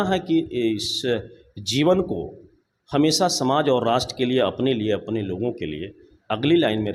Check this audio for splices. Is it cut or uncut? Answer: uncut